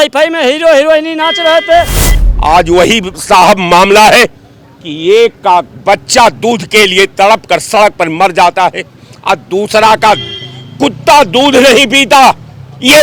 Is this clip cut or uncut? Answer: cut